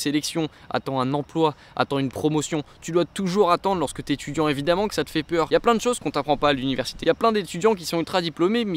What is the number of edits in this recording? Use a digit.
2